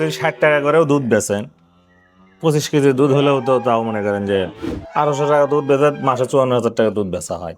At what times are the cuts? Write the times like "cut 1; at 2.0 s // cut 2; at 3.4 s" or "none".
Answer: cut 1; at 4.6 s